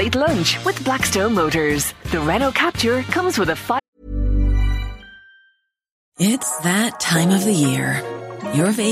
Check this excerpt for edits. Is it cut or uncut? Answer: cut